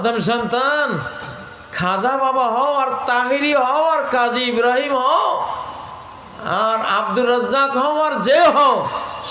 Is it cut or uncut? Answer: uncut